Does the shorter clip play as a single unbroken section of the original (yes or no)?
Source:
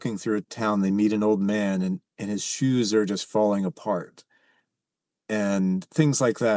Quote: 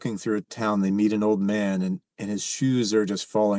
yes